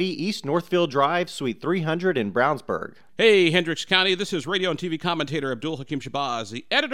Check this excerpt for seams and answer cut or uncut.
cut